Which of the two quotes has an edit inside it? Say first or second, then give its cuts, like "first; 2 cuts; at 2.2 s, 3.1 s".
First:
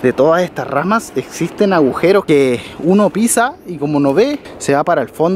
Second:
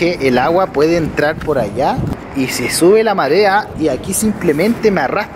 second; 2 cuts; at 2.2 s, 3.7 s